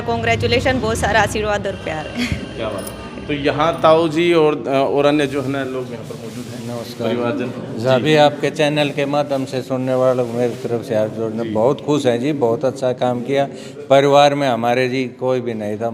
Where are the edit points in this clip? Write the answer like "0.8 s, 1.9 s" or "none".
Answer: none